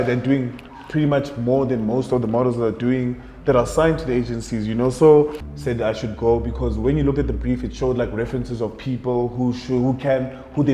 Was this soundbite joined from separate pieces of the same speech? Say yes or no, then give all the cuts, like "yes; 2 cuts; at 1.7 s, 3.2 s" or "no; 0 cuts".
yes; 1 cut; at 5.5 s